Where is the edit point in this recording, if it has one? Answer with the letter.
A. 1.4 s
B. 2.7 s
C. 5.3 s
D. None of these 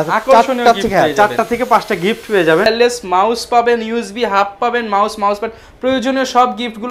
B